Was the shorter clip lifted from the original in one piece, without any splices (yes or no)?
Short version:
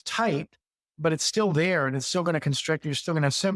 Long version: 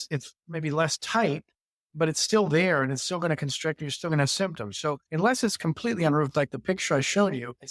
yes